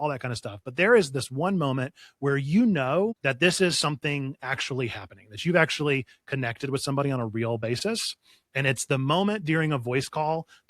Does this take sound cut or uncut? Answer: cut